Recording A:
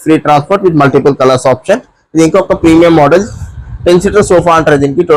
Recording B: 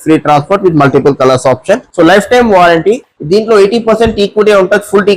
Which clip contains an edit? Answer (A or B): B